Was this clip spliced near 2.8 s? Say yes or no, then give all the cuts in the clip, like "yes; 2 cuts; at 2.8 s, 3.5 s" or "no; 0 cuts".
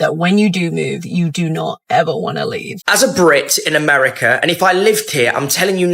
yes; 1 cut; at 2.8 s